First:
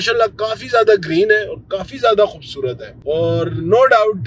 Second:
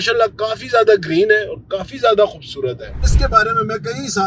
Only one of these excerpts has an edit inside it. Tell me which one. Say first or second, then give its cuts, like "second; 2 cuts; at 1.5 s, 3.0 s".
second; 1 cut; at 3.1 s